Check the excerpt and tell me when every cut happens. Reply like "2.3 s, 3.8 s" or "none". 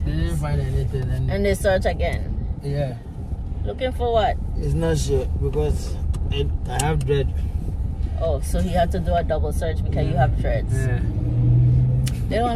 none